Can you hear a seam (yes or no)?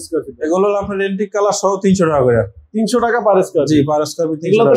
no